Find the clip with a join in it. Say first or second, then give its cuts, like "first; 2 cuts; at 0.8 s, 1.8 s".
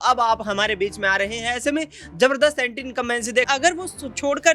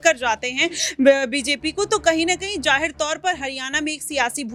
first; 1 cut; at 3.5 s